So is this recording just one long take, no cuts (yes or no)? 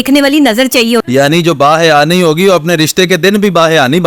no